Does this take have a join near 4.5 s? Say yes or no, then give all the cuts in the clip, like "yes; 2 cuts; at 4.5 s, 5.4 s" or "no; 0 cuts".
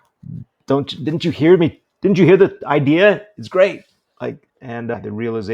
yes; 1 cut; at 4.5 s